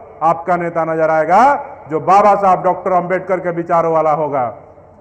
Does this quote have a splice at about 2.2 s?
no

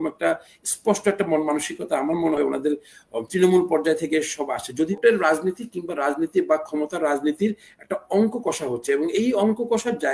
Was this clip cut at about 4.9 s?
yes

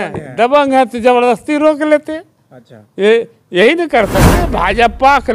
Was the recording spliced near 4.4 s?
yes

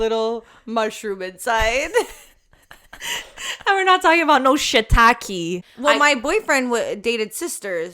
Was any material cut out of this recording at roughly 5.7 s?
yes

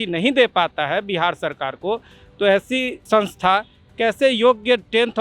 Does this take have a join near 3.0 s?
yes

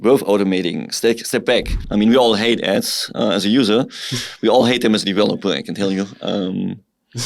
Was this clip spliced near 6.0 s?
no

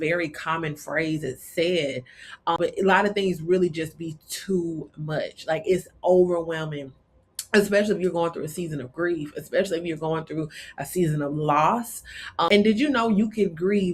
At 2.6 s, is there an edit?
yes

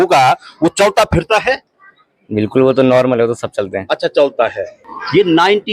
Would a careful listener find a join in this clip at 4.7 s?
yes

